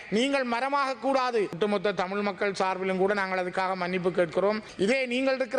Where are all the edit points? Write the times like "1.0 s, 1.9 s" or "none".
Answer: 1.6 s, 4.7 s